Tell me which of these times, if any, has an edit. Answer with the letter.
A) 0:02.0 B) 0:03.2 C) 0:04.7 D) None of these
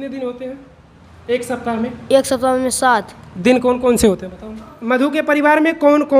C